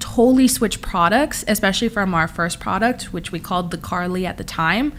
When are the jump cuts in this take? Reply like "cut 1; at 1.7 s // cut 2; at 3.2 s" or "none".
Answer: none